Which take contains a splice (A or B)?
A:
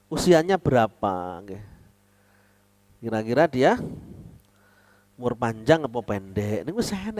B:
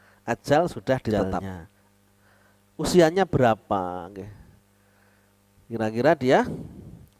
B